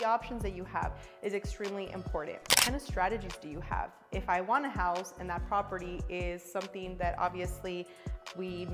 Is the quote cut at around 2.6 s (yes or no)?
yes